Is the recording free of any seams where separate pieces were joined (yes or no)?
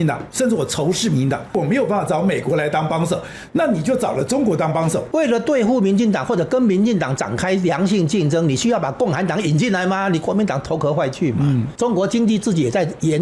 no